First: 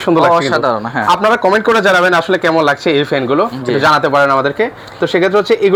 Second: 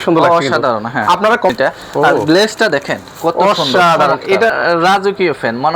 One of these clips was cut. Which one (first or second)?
second